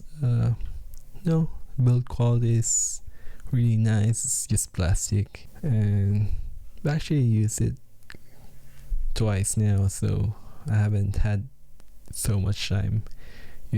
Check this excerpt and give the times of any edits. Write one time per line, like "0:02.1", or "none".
0:05.4